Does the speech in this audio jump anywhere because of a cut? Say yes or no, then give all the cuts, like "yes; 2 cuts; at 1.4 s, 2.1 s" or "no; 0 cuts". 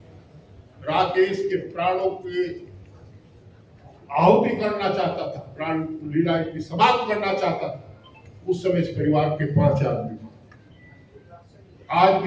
no; 0 cuts